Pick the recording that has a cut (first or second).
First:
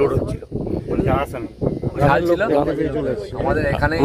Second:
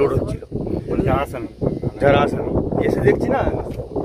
first